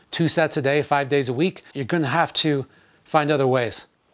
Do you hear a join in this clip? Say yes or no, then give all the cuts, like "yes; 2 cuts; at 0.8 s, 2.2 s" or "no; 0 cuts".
yes; 1 cut; at 1.7 s